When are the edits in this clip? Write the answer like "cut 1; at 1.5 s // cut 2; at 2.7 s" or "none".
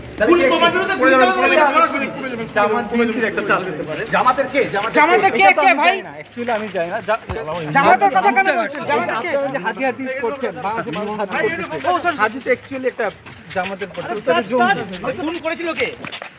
none